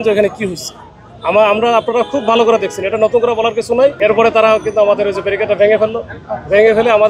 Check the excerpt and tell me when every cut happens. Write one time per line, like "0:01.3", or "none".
0:04.0